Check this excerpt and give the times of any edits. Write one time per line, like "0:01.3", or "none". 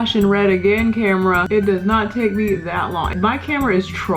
0:01.4
0:03.1